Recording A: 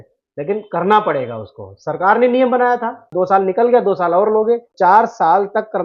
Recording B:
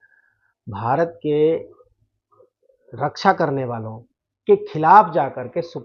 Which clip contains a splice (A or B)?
A